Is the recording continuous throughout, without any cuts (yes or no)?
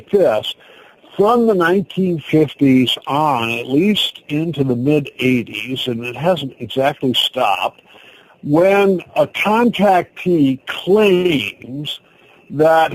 yes